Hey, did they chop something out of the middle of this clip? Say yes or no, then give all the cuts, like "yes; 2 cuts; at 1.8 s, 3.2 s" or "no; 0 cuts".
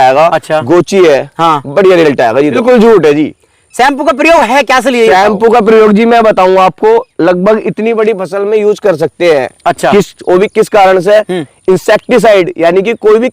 yes; 1 cut; at 2.6 s